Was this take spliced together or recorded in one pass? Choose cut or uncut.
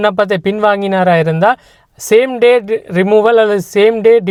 uncut